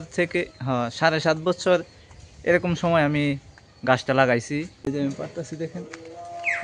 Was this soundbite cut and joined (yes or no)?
yes